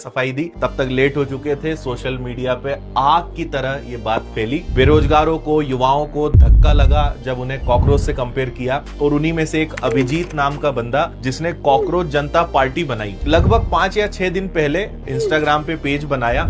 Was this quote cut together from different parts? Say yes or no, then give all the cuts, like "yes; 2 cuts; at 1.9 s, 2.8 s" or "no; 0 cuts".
no; 0 cuts